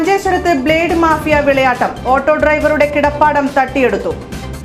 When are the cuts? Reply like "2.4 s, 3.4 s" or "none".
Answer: none

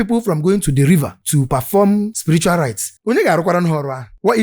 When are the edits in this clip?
2.1 s

